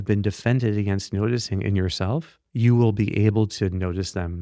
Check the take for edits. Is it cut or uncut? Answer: cut